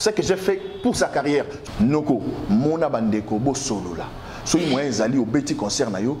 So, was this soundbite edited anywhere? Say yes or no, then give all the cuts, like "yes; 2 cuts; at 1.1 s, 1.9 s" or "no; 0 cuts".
yes; 1 cut; at 1.6 s